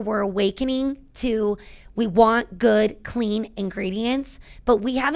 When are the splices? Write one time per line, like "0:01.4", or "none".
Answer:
none

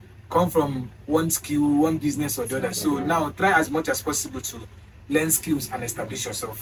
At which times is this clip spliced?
none

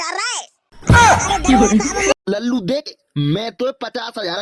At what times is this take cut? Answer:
0:02.2

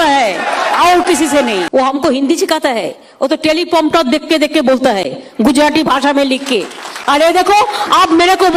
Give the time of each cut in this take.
0:01.7

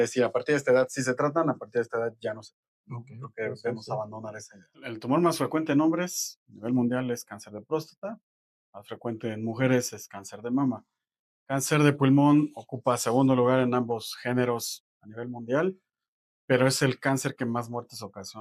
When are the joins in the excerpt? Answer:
0:04.9

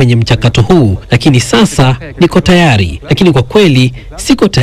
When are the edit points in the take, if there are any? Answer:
0:01.0
0:03.0

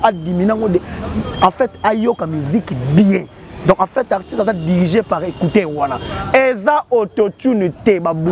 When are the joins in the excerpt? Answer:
none

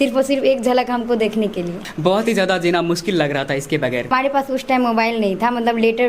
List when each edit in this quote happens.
0:01.8
0:04.1

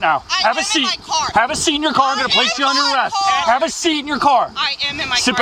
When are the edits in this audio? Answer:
none

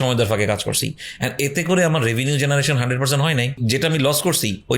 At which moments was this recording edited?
0:03.6

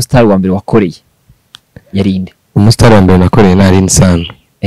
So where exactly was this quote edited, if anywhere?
none

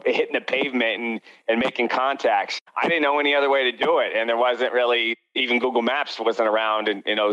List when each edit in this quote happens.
0:02.5

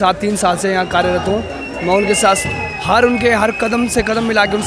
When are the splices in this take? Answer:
none

